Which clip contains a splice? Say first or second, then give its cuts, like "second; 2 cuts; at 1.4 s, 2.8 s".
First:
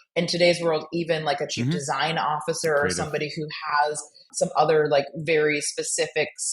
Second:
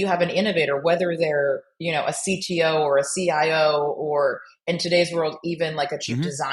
first; 1 cut; at 4.2 s